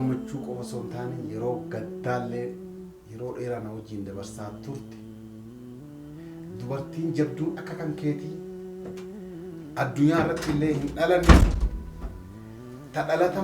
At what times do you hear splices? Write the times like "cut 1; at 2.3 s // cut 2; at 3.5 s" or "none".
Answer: cut 1; at 4.8 s // cut 2; at 6.6 s